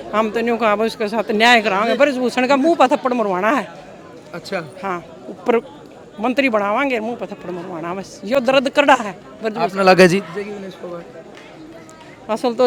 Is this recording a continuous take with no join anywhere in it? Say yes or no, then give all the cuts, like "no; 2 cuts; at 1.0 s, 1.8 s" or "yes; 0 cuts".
yes; 0 cuts